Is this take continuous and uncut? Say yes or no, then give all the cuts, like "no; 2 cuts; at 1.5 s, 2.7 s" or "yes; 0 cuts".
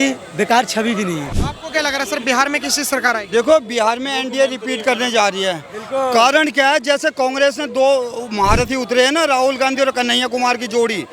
no; 1 cut; at 1.4 s